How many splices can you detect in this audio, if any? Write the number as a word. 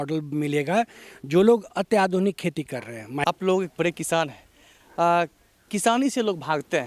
one